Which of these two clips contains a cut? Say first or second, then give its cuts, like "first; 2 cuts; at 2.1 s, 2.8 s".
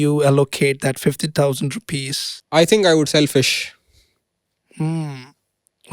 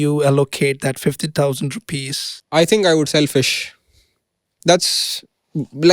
second; 1 cut; at 4.5 s